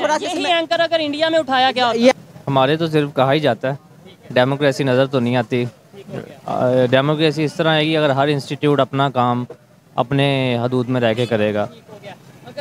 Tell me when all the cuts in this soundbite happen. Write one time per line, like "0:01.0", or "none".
0:02.1